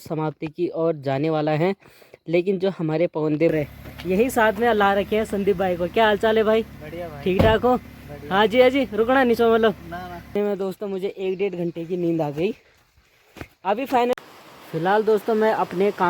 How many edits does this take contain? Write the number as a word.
three